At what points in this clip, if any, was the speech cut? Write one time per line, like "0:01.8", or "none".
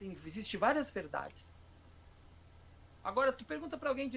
none